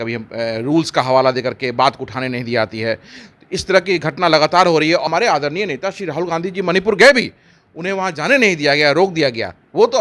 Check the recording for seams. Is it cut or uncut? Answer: cut